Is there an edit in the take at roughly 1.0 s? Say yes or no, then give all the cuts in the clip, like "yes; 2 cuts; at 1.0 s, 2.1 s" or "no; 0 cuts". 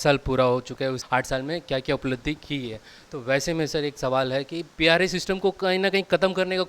yes; 2 cuts; at 1.0 s, 4.6 s